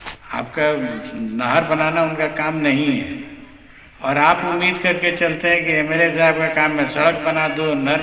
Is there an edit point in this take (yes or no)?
no